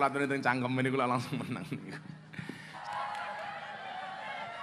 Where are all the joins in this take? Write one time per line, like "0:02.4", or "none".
0:02.8